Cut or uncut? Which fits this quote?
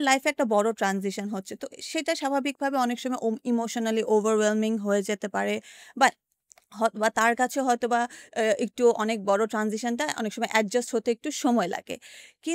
uncut